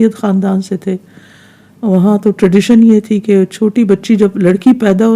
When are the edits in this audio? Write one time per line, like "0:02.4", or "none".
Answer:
none

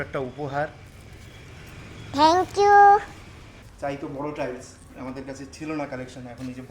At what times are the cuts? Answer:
0:03.6

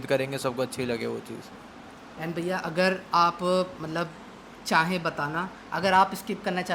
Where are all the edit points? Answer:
none

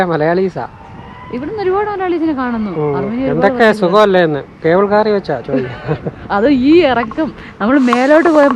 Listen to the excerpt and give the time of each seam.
none

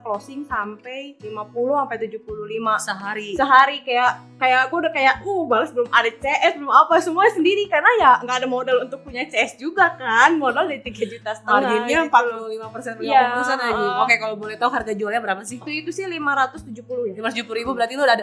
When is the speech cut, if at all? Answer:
0:15.7

